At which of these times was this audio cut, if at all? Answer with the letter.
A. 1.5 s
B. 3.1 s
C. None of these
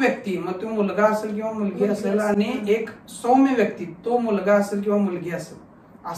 C